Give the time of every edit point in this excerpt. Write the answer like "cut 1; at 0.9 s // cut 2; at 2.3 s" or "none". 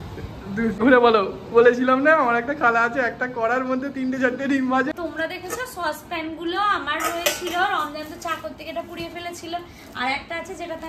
cut 1; at 0.8 s // cut 2; at 4.9 s